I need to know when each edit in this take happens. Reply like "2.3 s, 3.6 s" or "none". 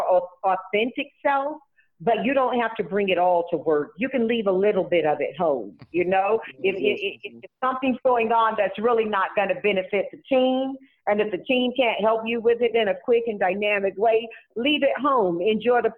none

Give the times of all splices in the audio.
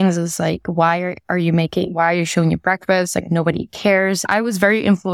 4.2 s

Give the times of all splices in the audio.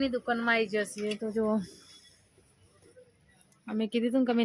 none

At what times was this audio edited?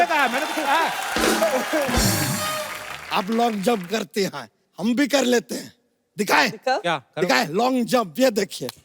2.7 s

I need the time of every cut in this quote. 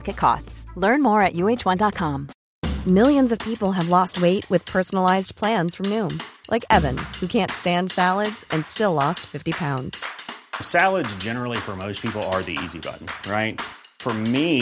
2.3 s

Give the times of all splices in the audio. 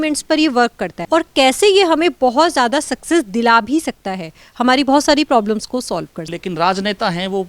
0.9 s, 6.3 s

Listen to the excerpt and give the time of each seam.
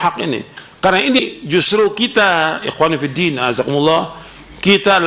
1.2 s

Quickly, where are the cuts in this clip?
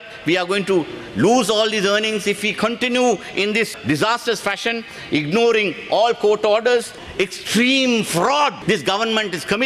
7.0 s, 8.6 s

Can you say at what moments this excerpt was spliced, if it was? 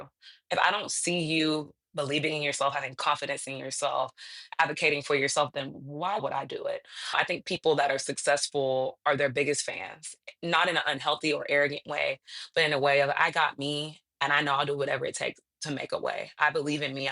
6.2 s

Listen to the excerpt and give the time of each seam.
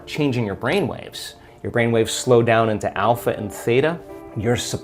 none

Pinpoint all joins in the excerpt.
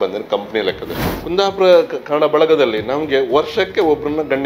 1.0 s

